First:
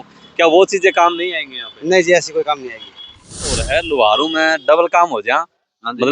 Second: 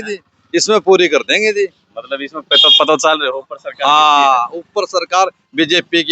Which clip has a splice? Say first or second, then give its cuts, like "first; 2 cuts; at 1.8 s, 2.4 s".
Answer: first; 1 cut; at 3.6 s